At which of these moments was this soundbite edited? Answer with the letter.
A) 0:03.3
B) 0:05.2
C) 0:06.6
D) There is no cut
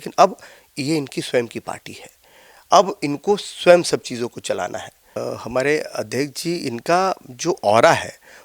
B